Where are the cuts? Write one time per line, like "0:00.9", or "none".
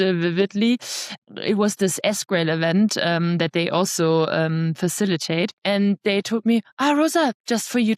0:01.2
0:05.6